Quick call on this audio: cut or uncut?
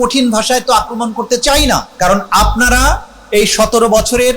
cut